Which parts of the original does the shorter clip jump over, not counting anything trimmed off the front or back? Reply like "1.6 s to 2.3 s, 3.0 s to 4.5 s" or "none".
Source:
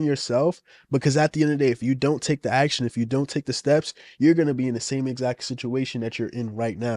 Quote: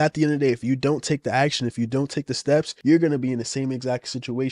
3.9 s to 4.1 s